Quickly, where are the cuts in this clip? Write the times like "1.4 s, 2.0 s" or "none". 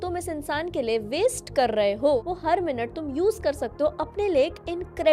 2.2 s